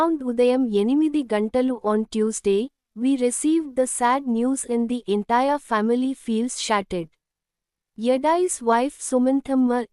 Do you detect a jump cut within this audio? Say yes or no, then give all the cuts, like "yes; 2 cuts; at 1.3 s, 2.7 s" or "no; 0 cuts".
no; 0 cuts